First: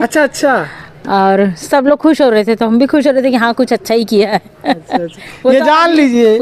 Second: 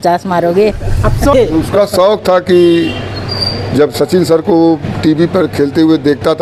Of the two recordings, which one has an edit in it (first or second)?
second